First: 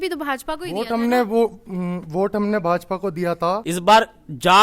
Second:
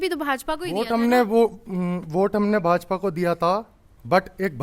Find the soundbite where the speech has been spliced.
first; 1 cut; at 3.7 s

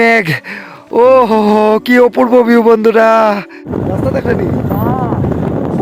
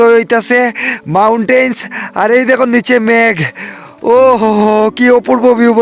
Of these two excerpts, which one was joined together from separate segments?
first; 1 cut; at 3.7 s

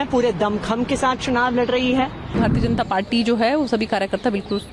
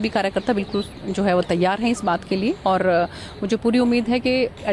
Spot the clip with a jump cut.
first; 1 cut; at 2.4 s

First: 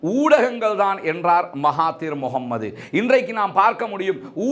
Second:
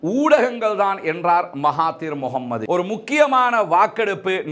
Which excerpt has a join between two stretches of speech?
second; 1 cut; at 2.6 s

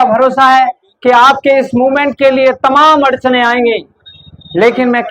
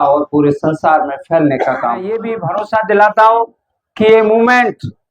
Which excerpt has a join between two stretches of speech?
second; 1 cut; at 2.4 s

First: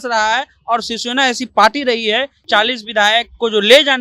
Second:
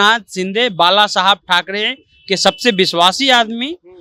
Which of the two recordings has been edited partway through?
first; 1 cut; at 2.4 s

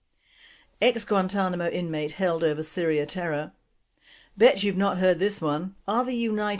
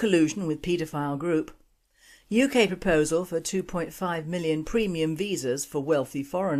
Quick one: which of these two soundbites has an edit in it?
second; 1 cut; at 3.5 s

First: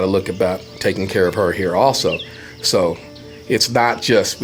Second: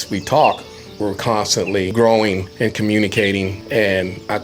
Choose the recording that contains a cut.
second; 3 cuts; at 1.9 s, 2.5 s, 3.6 s

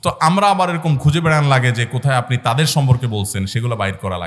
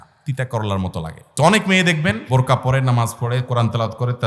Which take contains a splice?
second; 2 cuts; at 1.3 s, 2.2 s

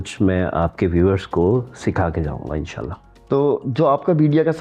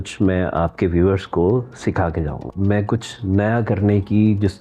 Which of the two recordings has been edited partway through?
second; 1 cut; at 2.4 s

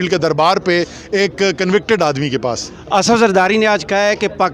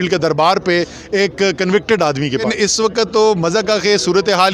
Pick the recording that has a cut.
second; 1 cut; at 2.5 s

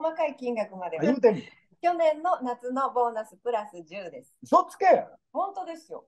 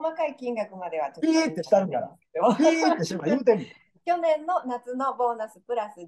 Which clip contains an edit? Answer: first; 1 cut; at 0.9 s

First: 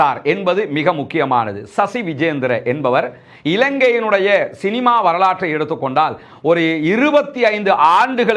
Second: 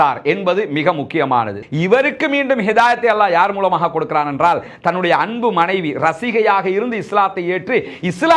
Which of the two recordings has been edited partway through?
second; 1 cut; at 1.6 s

